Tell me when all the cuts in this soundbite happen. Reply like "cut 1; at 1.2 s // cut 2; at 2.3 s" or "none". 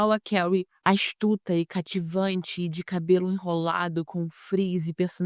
none